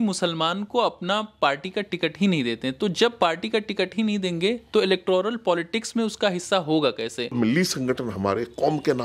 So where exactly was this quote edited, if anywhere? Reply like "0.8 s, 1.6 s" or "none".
7.3 s